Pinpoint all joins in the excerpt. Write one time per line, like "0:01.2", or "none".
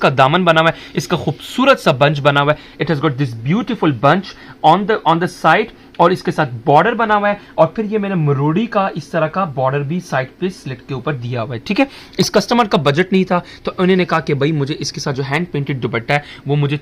none